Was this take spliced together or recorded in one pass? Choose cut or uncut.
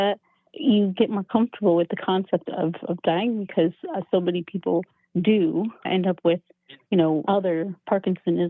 cut